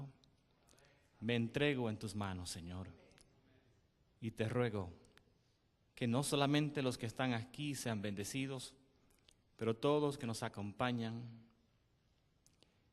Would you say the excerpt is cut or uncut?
cut